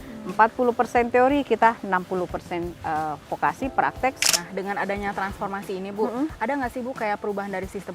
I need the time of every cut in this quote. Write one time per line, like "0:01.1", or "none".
0:04.2